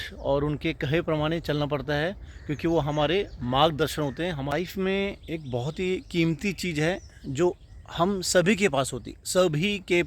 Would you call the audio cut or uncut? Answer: cut